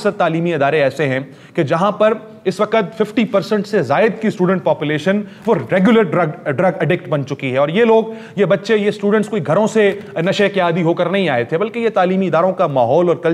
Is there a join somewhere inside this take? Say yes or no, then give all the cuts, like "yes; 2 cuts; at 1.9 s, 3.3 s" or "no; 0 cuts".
no; 0 cuts